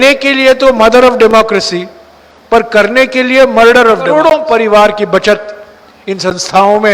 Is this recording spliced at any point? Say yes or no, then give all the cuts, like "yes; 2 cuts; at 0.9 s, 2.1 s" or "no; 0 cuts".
yes; 1 cut; at 4.1 s